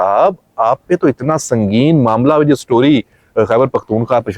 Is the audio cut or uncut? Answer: uncut